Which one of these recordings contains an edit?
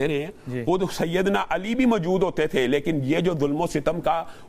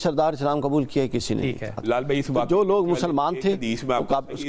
second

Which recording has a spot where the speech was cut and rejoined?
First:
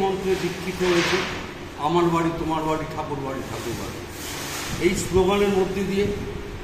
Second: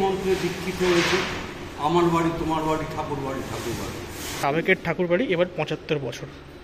second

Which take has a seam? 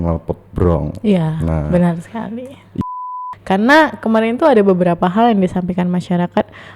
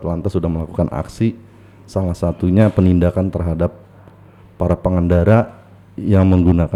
first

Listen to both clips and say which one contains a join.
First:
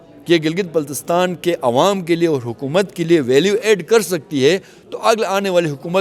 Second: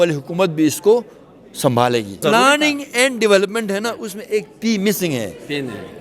second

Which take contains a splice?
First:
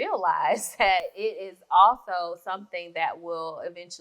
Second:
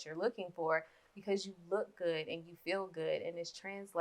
first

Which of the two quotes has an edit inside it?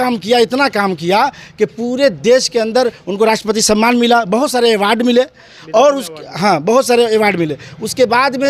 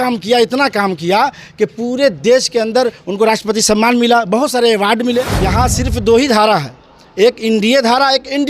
second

